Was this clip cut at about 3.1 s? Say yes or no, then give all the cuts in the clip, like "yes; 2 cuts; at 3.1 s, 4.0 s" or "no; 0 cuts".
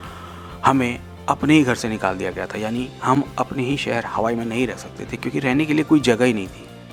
no; 0 cuts